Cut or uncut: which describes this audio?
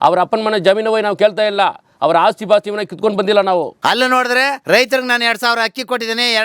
cut